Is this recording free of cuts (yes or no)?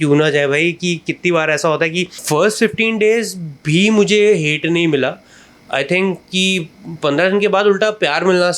no